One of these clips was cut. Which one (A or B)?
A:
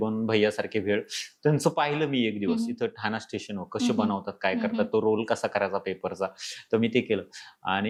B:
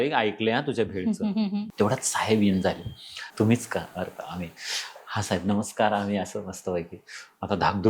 B